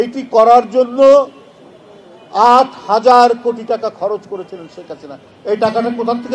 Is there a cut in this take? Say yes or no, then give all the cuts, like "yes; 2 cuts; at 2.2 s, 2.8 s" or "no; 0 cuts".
no; 0 cuts